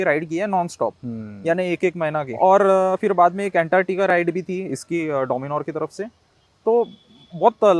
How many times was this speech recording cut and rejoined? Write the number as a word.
zero